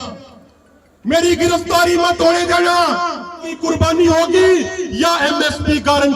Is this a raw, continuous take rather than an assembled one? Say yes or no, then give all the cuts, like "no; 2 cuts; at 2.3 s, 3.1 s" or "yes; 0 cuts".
no; 1 cut; at 3.5 s